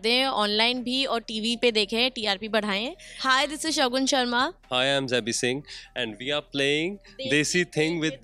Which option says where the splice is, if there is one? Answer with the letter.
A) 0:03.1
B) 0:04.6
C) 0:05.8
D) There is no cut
A